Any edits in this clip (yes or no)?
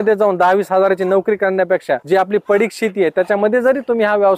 no